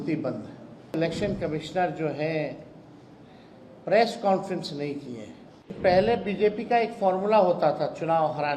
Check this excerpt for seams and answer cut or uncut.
cut